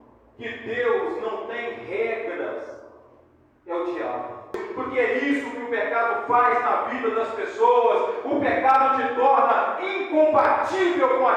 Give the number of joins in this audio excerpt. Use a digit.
1